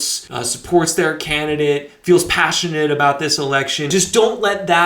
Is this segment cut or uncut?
cut